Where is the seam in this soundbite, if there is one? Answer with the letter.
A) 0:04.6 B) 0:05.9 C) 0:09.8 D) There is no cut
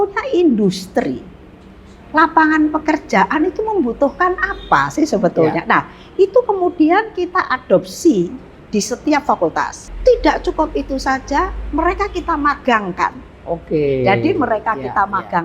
C